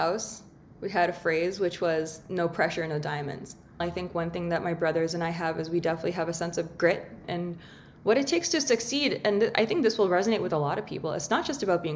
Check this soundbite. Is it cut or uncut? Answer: cut